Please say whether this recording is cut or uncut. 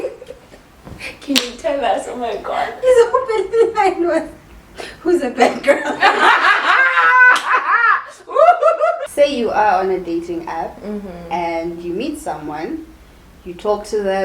cut